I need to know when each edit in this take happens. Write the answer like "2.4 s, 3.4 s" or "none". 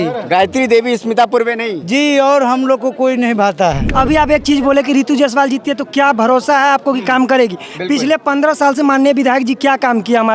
3.8 s